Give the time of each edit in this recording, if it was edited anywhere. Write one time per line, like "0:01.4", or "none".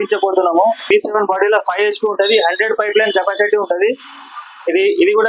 0:00.9

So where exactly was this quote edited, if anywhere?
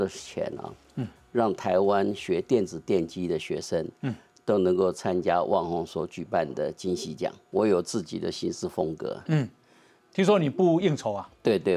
0:07.4

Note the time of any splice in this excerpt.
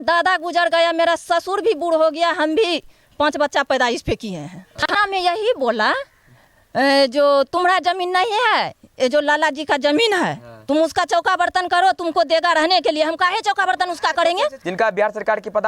0:04.8
0:14.6

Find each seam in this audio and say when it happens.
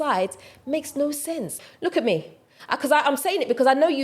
0:01.6

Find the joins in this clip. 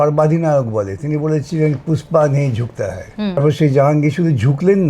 0:03.4

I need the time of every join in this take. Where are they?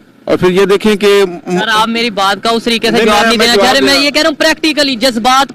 none

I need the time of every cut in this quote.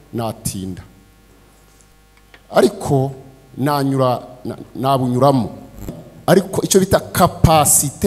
0:06.0

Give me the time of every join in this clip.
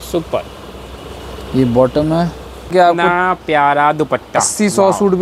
0:02.7

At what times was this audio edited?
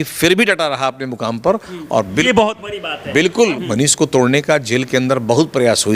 0:03.6

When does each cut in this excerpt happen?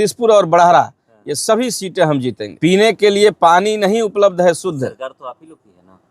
0:02.4

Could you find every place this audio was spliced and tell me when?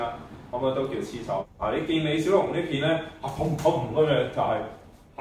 0:01.5

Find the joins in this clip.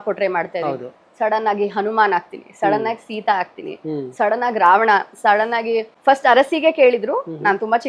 0:05.9

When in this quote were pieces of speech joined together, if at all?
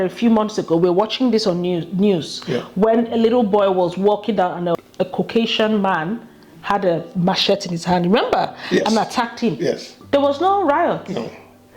0:04.8

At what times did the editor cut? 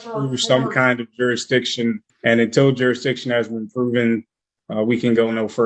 0:02.1

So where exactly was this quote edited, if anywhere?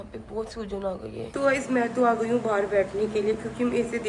0:01.2

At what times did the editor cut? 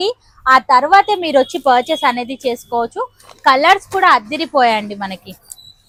none

